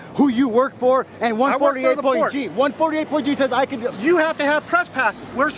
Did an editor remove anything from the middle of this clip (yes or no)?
no